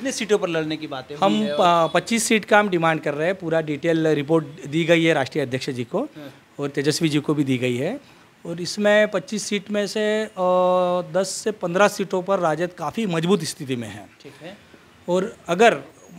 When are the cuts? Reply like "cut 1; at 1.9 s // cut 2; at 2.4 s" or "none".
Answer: none